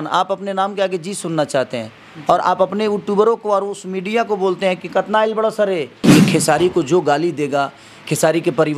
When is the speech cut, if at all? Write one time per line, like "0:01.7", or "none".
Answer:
0:05.9